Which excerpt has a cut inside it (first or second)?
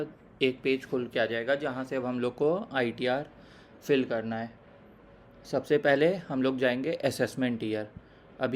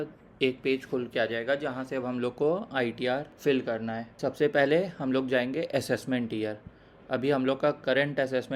second